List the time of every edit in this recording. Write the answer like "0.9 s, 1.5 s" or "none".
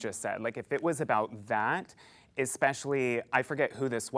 none